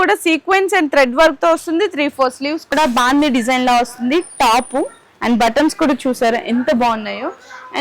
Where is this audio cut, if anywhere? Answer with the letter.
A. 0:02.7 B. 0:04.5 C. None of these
A